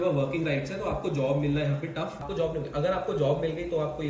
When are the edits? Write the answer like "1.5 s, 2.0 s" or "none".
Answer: 2.2 s